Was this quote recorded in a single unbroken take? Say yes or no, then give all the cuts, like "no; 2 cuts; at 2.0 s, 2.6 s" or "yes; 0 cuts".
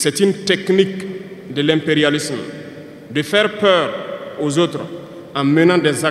yes; 0 cuts